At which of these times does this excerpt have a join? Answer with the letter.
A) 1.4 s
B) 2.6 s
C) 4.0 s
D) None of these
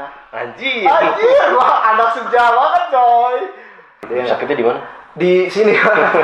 C